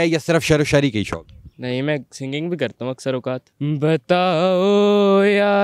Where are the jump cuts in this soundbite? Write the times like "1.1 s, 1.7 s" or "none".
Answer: 3.5 s